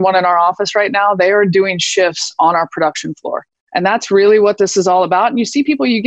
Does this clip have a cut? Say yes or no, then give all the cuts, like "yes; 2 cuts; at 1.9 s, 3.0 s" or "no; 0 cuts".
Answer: yes; 1 cut; at 3.5 s